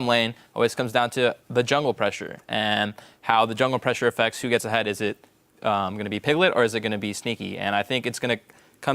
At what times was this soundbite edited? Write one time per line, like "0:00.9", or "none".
0:06.7